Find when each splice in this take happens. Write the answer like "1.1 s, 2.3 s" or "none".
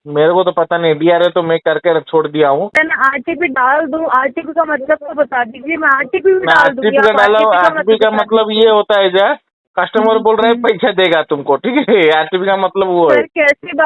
2.8 s